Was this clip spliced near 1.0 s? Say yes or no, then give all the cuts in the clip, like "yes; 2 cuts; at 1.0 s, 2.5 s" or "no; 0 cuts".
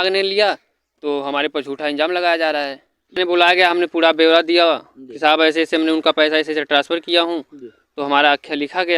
no; 1 cut; at 3.1 s